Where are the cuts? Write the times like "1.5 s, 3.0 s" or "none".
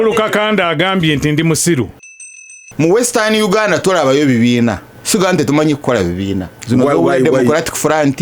2.2 s, 4.9 s, 6.5 s